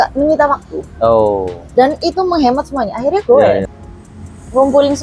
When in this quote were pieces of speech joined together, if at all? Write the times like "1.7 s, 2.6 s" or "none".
3.7 s